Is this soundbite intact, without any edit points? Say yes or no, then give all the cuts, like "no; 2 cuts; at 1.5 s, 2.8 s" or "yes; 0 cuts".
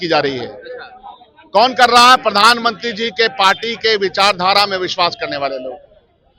yes; 0 cuts